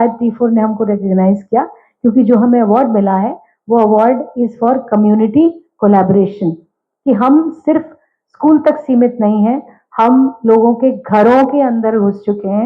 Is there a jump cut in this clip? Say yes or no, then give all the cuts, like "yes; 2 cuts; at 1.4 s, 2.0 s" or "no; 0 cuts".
no; 0 cuts